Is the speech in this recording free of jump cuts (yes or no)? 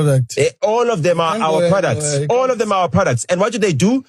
yes